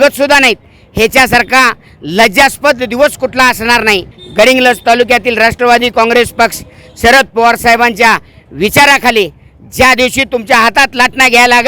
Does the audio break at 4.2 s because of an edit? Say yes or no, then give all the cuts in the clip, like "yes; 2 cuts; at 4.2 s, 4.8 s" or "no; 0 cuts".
yes; 1 cut; at 4.2 s